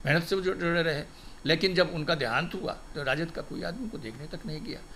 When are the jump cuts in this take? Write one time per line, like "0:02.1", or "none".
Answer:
0:02.9